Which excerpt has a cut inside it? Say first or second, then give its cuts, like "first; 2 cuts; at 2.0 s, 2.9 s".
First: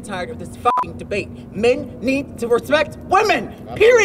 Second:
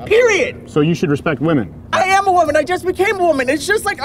second; 1 cut; at 1.9 s